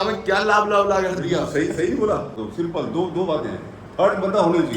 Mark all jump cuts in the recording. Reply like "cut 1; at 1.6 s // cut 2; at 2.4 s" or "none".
cut 1; at 2.4 s